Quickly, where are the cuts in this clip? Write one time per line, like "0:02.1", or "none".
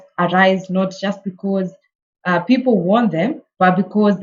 none